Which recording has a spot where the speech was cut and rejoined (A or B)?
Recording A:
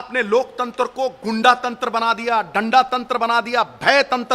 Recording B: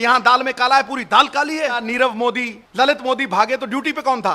B